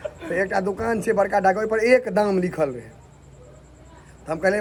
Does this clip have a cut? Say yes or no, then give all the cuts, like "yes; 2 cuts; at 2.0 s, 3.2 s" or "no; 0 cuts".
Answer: no; 0 cuts